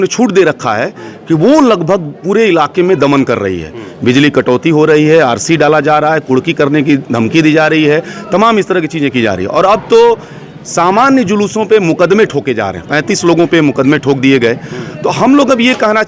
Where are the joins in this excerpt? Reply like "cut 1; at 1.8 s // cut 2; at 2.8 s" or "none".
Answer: none